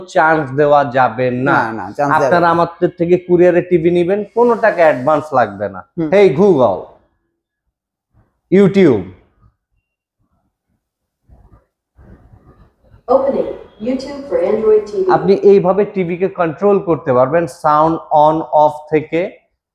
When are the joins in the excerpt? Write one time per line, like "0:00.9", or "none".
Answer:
0:06.1